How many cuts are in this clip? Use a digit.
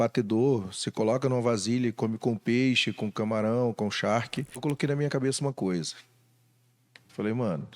1